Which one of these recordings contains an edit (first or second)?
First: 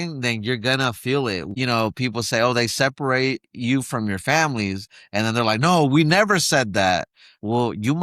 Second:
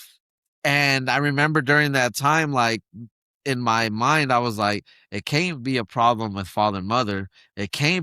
first